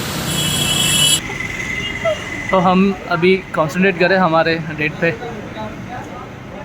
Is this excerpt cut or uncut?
cut